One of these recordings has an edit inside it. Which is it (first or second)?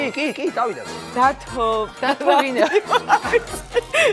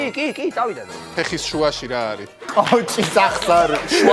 second